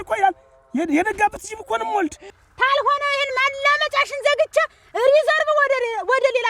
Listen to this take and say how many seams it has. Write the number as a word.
one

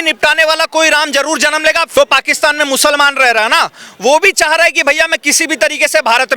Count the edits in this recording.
one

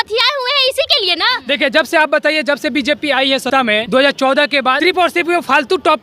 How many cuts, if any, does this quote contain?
three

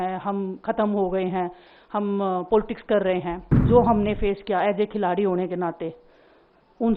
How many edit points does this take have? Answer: one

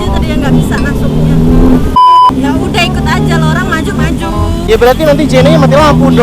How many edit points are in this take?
one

